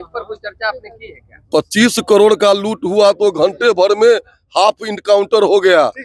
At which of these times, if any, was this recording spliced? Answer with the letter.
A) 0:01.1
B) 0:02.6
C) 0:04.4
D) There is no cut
D